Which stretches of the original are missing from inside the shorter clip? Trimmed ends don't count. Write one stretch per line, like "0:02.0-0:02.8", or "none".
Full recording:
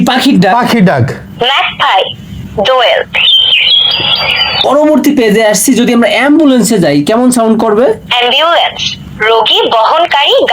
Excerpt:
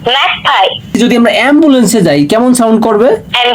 0:02.3-0:05.7

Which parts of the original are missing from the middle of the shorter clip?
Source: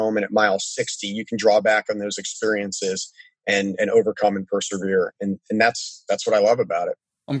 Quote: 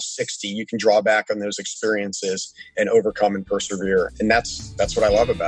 0:03.3-0:03.7
0:05.1-0:05.4

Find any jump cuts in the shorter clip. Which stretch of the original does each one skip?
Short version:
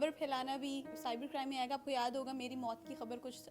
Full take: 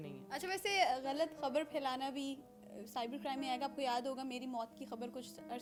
0:02.5-0:02.8

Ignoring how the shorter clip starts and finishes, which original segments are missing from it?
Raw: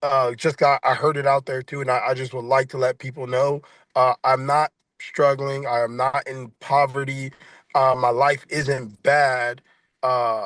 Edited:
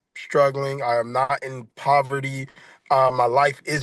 none

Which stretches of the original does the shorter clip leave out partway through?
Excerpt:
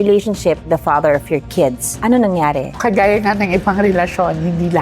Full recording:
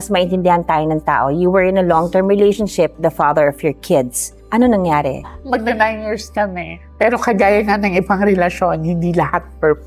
0:04.2-0:04.4
0:05.3-0:07.2

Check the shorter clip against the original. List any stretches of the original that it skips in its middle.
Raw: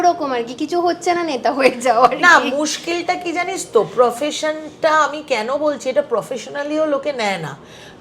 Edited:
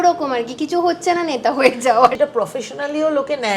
0:02.2-0:05.9

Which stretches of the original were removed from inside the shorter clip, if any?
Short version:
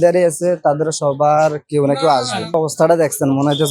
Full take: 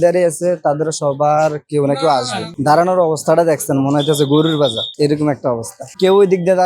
0:02.6-0:03.0

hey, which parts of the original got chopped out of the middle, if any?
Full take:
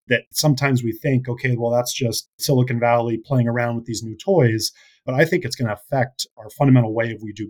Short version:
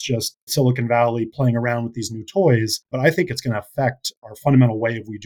0:04.7-0:05.0

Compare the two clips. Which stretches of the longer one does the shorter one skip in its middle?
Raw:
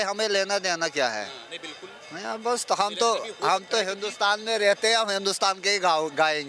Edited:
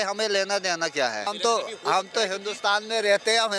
0:01.3-0:02.8

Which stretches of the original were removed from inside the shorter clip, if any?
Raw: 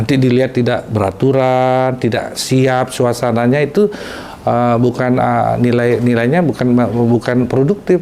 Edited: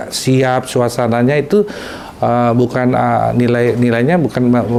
none

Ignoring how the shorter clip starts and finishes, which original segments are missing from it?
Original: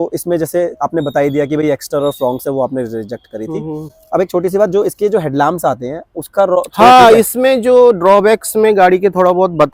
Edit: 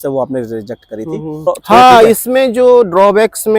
0:03.9-0:06.6

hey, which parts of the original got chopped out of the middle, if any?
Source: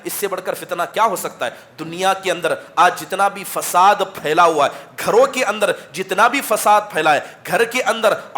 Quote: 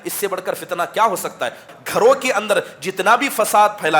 0:01.8-0:04.9

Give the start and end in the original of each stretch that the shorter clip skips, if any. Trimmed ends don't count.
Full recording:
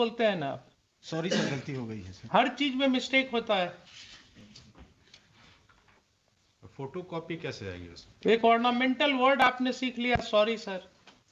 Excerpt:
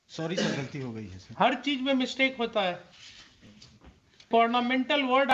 0:05.2-0:08.4

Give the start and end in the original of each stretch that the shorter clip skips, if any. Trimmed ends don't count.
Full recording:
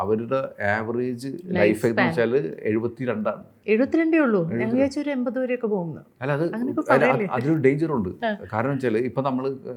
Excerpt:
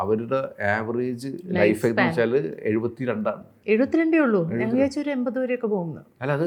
none

